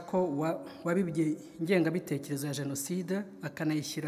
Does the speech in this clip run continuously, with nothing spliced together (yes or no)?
yes